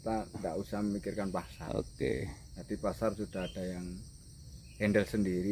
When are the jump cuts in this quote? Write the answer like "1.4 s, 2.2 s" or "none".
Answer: none